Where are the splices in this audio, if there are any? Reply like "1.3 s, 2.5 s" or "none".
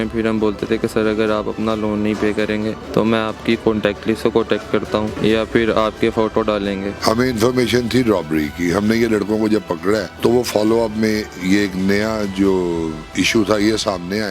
2.8 s, 5.1 s, 6.9 s, 10.1 s